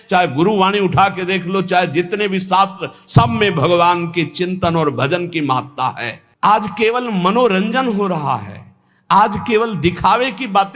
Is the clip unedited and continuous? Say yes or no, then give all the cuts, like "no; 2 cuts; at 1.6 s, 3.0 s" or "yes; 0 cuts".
no; 1 cut; at 6.2 s